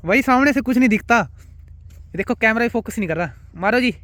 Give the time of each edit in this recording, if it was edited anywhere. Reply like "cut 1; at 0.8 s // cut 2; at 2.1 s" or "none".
none